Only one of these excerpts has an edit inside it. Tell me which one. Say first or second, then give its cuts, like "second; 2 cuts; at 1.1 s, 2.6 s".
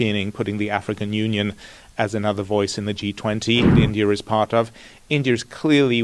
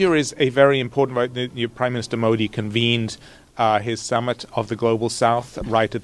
first; 1 cut; at 3.7 s